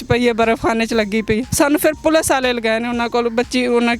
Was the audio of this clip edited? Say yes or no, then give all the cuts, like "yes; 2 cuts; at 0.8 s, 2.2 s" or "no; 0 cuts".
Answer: yes; 1 cut; at 1.5 s